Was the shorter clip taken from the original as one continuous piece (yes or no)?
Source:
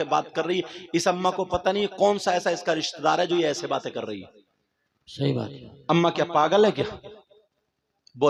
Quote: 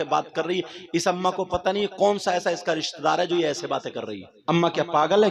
no